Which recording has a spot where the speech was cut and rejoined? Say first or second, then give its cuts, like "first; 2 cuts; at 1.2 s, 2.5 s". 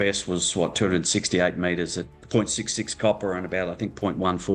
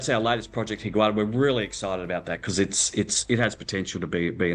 first; 1 cut; at 2.1 s